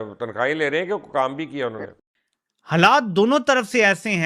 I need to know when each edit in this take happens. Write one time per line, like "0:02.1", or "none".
0:02.0